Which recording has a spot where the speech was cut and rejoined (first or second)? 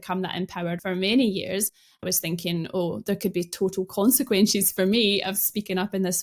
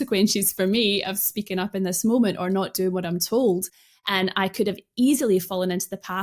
first